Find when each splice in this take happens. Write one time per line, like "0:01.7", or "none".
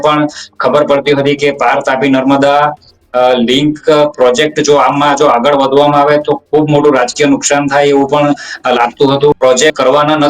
0:09.4